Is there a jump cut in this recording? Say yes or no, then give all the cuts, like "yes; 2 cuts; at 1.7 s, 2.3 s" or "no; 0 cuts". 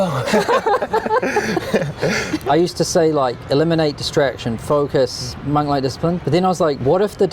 yes; 2 cuts; at 2.4 s, 6.2 s